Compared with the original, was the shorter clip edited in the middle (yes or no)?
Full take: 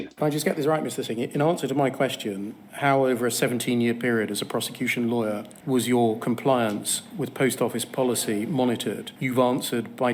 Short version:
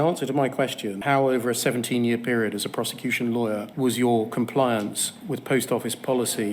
yes